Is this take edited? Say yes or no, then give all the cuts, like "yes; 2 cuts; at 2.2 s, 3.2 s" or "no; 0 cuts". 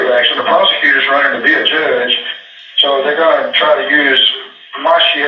no; 0 cuts